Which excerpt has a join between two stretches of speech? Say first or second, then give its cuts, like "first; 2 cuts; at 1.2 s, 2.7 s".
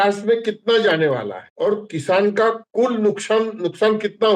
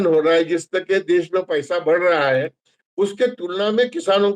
first; 1 cut; at 1.4 s